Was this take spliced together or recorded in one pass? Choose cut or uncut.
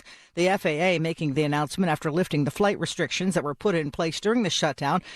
uncut